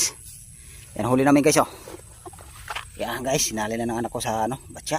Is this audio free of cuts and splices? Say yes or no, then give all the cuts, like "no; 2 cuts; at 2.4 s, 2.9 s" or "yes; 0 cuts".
yes; 0 cuts